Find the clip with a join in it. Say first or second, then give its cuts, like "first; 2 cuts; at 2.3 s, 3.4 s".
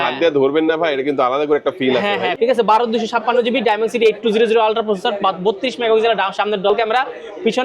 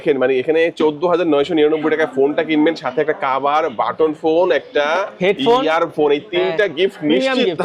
first; 2 cuts; at 2.3 s, 6.7 s